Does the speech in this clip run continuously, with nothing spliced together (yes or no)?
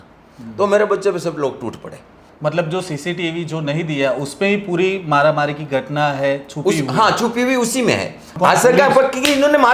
no